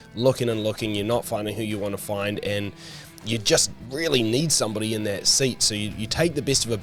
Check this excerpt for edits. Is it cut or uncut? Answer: uncut